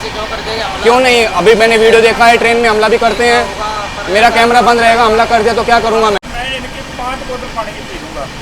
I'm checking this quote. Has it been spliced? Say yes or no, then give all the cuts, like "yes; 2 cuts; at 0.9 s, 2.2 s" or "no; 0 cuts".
yes; 1 cut; at 6.2 s